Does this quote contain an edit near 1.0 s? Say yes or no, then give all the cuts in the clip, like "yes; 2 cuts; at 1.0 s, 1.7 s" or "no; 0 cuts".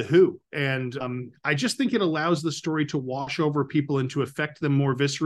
yes; 1 cut; at 1.0 s